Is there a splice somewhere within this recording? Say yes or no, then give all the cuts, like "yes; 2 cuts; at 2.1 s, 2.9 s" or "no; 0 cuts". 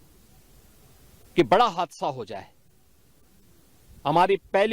no; 0 cuts